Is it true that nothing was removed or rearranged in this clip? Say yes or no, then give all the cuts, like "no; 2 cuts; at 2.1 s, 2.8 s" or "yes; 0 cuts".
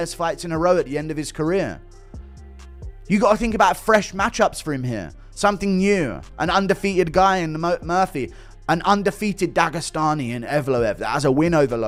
yes; 0 cuts